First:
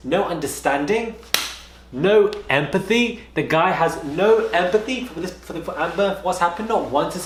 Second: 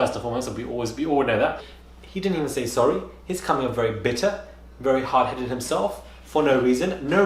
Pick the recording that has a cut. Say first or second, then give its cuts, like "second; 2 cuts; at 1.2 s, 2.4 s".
second; 1 cut; at 1.7 s